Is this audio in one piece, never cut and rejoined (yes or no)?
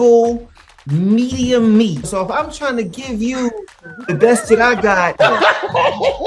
no